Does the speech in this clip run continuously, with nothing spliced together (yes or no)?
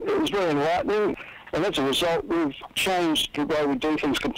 no